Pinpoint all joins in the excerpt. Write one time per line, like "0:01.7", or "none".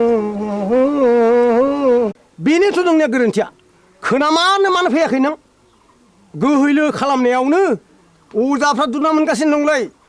0:02.2